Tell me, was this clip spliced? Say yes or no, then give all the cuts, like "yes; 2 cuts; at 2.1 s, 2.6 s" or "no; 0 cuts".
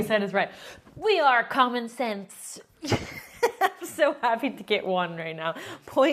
no; 0 cuts